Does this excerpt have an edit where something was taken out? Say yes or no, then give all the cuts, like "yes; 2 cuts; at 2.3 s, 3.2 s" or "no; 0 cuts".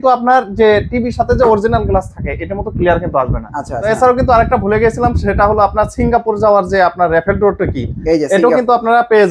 yes; 1 cut; at 3.8 s